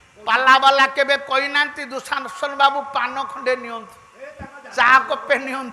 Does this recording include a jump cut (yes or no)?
no